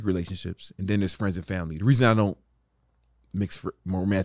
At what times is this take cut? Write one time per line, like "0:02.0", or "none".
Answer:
none